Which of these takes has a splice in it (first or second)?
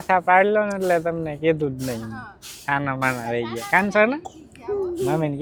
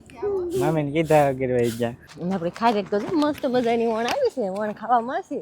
second